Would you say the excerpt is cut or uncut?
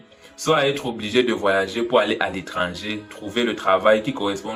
uncut